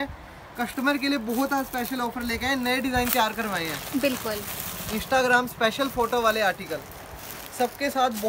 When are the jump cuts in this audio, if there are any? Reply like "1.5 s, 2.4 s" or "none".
none